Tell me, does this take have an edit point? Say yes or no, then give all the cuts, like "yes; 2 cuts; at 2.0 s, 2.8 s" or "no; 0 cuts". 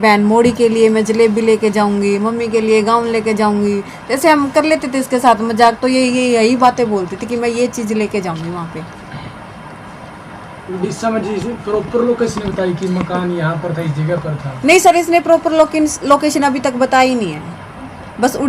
no; 0 cuts